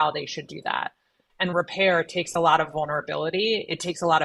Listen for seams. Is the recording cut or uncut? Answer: cut